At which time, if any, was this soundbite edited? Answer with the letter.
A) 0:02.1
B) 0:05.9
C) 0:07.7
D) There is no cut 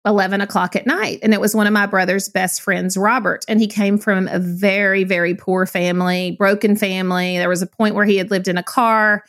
D